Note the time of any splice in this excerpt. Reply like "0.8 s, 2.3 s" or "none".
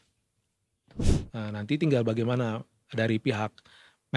1.0 s